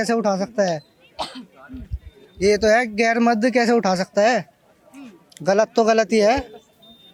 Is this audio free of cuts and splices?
yes; 0 cuts

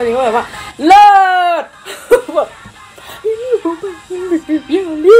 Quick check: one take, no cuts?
yes; 0 cuts

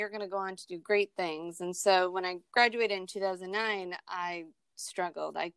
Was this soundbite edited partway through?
no; 0 cuts

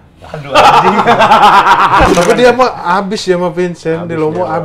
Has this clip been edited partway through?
yes; 1 cut; at 2.1 s

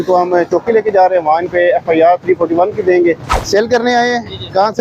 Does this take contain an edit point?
yes; 1 cut; at 3.3 s

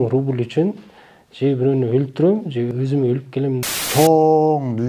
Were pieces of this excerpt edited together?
yes; 2 cuts; at 2.7 s, 3.6 s

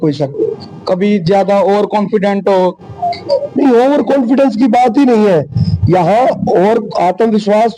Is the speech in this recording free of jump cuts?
yes; 0 cuts

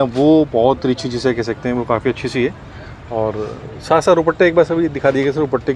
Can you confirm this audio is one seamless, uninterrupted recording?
yes; 0 cuts

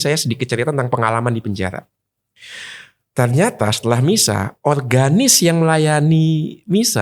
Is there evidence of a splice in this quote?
no; 0 cuts

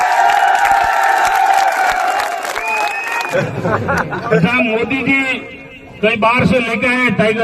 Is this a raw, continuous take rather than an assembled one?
no; 1 cut; at 3.2 s

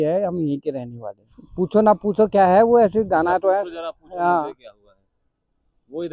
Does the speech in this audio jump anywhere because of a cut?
yes; 1 cut; at 1.4 s

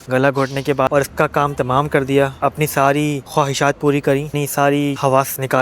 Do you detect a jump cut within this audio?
yes; 3 cuts; at 0.9 s, 2.3 s, 4.3 s

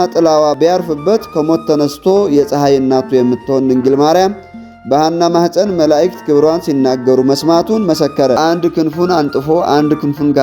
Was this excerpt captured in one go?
no; 1 cut; at 8.4 s

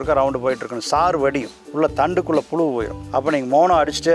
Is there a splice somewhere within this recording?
yes; 2 cuts; at 1.5 s, 3.0 s

